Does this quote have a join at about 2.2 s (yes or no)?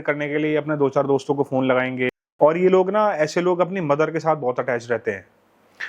yes